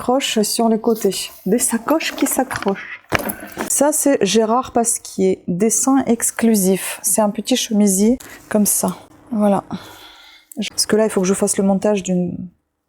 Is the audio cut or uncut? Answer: cut